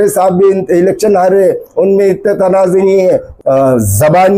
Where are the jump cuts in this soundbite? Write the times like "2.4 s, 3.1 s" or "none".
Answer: 3.3 s